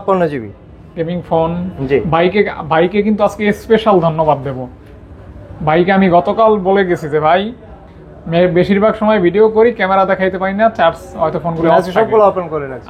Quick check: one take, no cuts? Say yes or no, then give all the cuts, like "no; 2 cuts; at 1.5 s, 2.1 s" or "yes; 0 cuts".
yes; 0 cuts